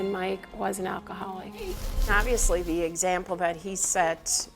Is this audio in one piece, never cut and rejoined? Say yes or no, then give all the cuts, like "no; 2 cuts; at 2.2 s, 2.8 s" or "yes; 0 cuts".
no; 1 cut; at 1.9 s